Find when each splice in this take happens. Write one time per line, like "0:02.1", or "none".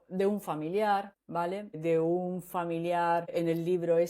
0:01.2